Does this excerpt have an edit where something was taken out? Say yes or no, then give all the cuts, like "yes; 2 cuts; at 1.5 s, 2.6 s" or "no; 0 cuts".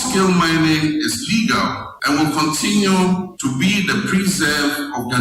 yes; 2 cuts; at 1.9 s, 3.3 s